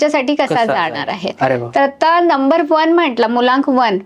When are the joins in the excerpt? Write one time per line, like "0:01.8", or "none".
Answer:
none